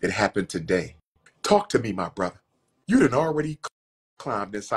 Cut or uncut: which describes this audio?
cut